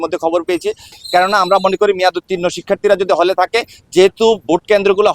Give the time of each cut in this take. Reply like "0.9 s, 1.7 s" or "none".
1.0 s